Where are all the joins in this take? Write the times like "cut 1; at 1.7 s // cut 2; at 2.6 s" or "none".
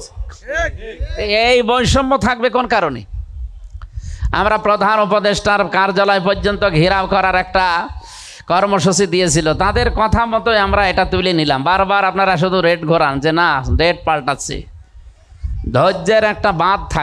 none